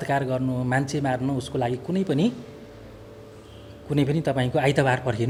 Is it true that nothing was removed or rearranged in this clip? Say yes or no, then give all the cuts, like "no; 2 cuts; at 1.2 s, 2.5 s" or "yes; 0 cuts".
yes; 0 cuts